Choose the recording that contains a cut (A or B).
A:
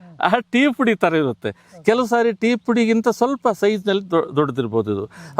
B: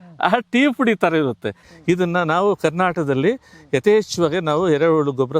B